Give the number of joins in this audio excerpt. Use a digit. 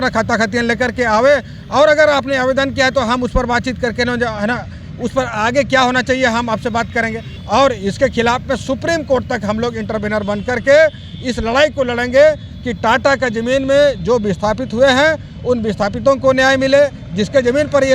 1